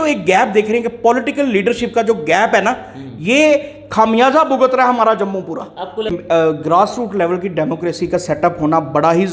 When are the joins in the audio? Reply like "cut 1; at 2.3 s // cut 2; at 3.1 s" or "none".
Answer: cut 1; at 6.1 s